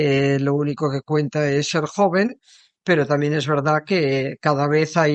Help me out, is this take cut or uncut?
uncut